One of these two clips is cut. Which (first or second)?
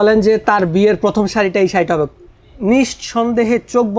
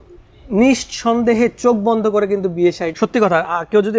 second